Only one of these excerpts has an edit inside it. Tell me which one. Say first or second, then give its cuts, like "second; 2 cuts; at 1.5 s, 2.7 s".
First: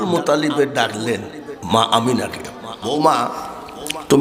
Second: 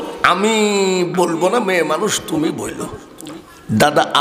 first; 1 cut; at 2.8 s